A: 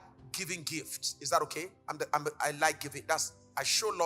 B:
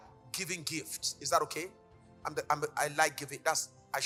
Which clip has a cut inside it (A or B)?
A